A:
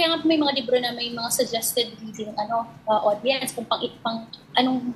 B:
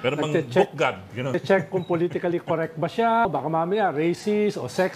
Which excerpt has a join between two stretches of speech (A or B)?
B